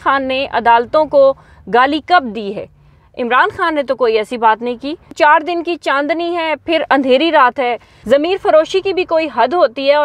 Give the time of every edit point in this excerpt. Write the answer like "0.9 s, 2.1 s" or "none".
5.1 s, 7.9 s